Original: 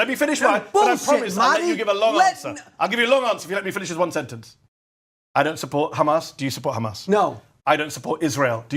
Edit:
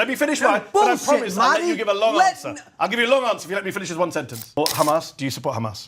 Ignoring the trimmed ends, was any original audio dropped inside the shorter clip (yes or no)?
yes